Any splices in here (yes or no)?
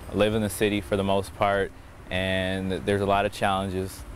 no